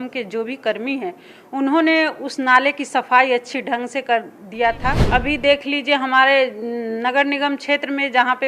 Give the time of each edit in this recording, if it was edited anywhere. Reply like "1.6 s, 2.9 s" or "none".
5.0 s